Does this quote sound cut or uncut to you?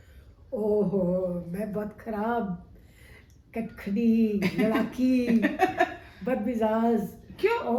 uncut